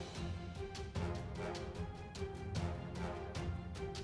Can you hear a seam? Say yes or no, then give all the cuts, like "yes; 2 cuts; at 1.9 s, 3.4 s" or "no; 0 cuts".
no; 0 cuts